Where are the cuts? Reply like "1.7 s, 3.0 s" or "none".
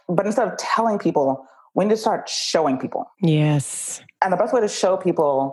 none